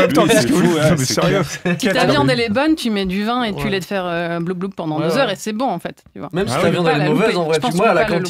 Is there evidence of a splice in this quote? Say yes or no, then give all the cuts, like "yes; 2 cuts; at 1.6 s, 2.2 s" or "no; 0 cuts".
yes; 1 cut; at 1.8 s